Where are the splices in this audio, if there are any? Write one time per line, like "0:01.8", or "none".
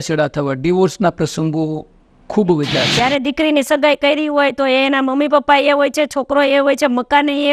0:02.9